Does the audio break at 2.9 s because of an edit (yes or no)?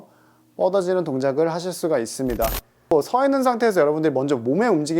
yes